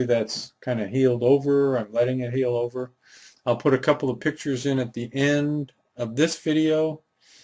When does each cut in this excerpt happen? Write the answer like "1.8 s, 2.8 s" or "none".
1.9 s